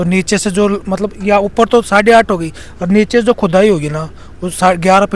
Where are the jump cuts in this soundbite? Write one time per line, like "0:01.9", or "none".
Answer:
none